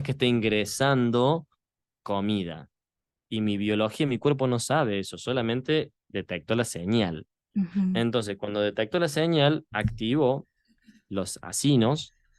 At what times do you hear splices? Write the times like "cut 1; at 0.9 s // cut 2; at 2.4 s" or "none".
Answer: none

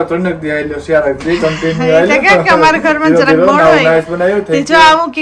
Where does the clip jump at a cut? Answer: none

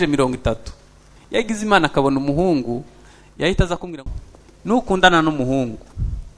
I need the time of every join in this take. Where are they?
cut 1; at 4.0 s

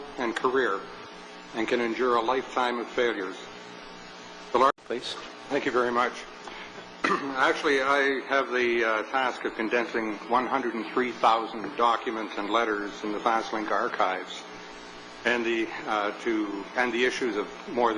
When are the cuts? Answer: none

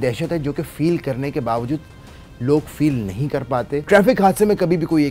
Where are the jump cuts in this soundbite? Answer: cut 1; at 3.8 s

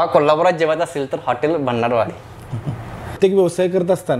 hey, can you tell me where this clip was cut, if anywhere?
cut 1; at 3.1 s

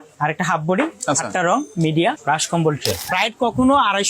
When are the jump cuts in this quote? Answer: cut 1; at 3.0 s

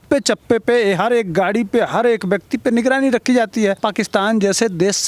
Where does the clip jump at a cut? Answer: cut 1; at 3.8 s

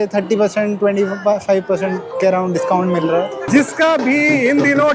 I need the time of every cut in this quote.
cut 1; at 3.5 s

